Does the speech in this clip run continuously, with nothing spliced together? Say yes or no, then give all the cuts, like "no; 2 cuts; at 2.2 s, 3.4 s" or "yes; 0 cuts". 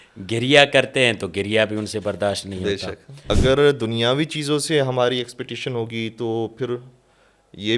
no; 1 cut; at 3.3 s